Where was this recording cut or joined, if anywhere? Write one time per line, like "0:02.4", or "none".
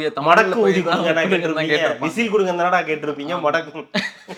none

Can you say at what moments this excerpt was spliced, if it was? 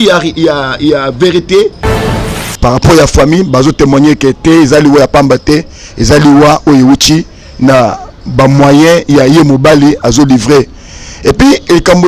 0:02.0

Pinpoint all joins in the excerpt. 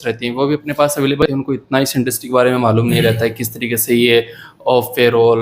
0:01.2

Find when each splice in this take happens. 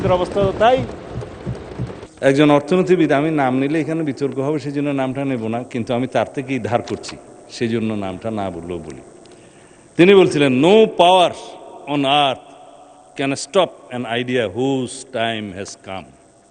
0:02.0

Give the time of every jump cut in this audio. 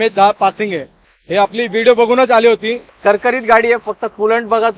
0:02.9

